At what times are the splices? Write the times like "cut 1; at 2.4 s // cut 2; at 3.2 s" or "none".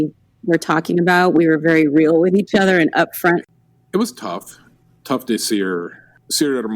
cut 1; at 3.4 s